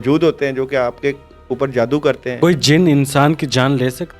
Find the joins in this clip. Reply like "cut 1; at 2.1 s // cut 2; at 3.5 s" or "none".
cut 1; at 2.4 s